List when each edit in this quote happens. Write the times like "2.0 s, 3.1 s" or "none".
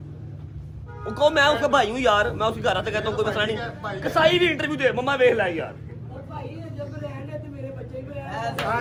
none